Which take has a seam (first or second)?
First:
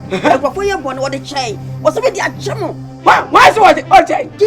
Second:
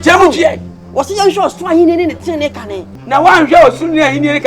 second